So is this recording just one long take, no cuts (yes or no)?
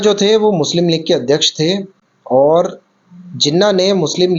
yes